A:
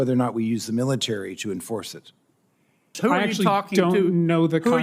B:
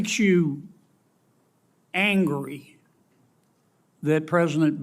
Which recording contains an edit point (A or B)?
A